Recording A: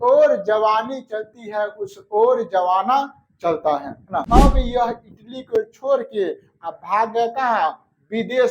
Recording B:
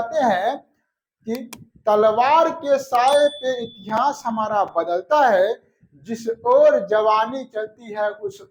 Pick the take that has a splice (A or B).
A